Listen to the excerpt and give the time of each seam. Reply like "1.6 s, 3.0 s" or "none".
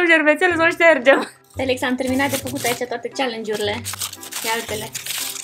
1.3 s